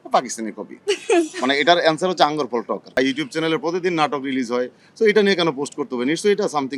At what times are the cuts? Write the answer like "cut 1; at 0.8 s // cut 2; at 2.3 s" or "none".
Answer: cut 1; at 3.0 s